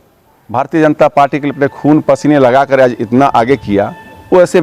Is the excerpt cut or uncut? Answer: uncut